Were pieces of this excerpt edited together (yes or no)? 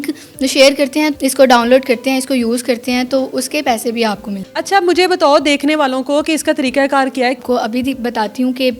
yes